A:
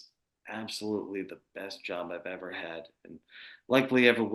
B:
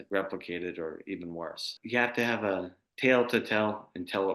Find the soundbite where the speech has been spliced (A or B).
B